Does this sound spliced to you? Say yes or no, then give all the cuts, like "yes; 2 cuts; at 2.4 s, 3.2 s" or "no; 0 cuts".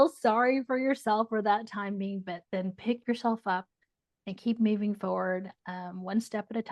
no; 0 cuts